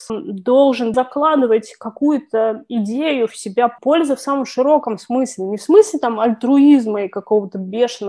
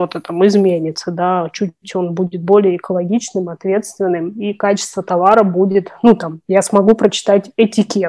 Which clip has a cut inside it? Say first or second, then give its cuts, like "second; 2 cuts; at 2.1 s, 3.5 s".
first; 2 cuts; at 0.9 s, 3.8 s